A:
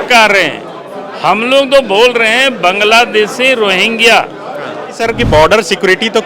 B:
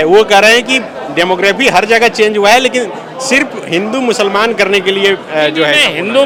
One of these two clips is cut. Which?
A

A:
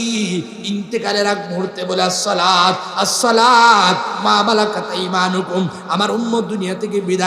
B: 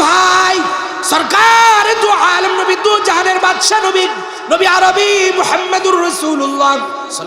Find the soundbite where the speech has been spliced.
B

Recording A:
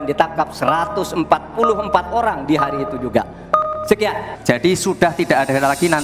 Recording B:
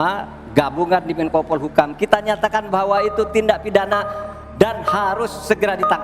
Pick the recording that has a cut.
A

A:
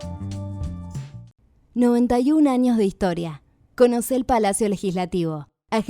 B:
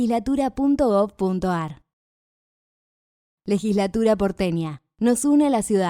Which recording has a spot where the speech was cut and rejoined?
A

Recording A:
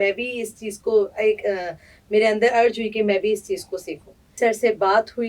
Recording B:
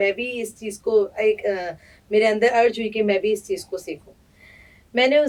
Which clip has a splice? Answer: A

